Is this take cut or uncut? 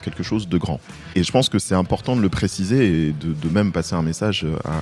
cut